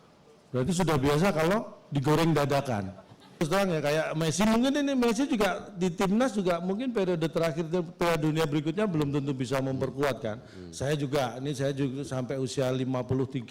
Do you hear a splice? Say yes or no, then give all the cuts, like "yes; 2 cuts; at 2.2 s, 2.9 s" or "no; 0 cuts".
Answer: yes; 1 cut; at 3.4 s